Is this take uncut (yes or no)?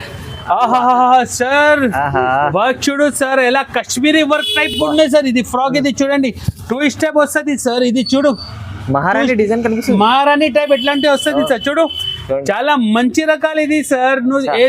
yes